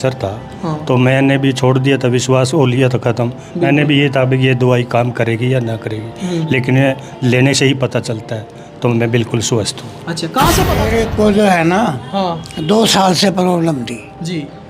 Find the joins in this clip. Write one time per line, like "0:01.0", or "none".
0:10.8